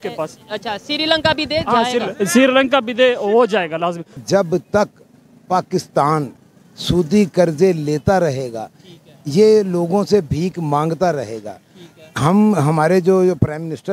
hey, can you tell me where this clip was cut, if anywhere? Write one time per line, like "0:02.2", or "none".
0:04.2